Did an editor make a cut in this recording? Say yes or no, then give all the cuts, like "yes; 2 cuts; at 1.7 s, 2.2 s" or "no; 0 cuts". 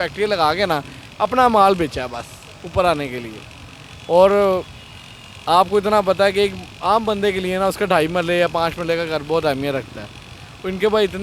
no; 0 cuts